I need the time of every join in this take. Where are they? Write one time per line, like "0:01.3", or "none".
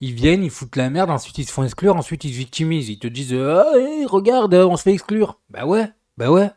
none